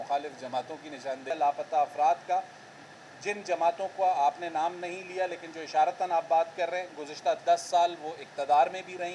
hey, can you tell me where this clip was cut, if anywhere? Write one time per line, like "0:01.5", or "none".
0:01.3